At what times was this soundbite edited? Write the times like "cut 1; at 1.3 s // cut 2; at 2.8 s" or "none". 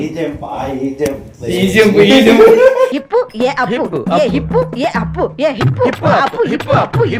none